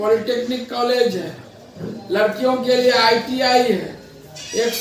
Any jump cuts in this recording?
no; 0 cuts

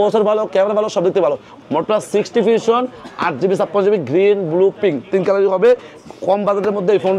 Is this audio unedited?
no; 1 cut; at 1.5 s

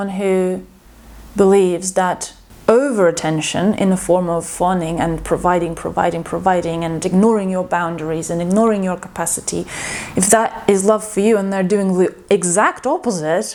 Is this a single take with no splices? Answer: yes; 0 cuts

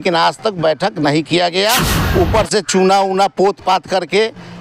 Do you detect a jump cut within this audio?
yes; 1 cut; at 1.9 s

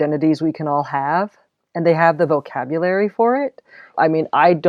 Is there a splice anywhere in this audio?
no; 0 cuts

